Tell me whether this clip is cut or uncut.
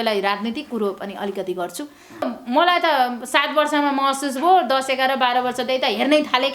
cut